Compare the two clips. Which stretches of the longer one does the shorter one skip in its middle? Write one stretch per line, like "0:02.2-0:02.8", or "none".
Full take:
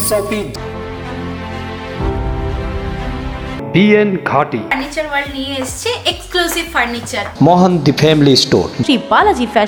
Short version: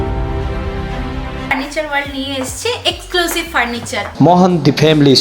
0:03.5-0:04.7